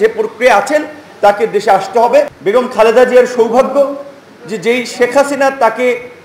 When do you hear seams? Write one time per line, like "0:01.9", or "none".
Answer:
0:02.3